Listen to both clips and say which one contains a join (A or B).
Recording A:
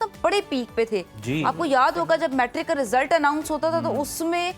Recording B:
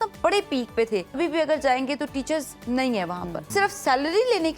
B